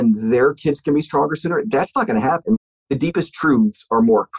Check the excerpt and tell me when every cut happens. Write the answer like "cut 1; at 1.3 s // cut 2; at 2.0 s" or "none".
cut 1; at 2.6 s